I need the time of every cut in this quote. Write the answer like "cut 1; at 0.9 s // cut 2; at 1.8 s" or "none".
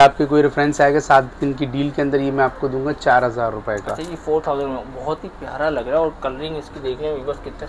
none